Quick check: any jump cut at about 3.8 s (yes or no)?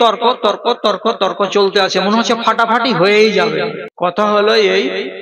yes